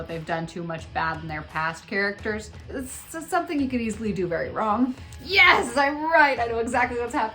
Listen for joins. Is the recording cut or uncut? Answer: cut